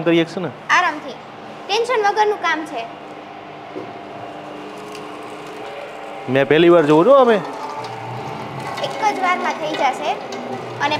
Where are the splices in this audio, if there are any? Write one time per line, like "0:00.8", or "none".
none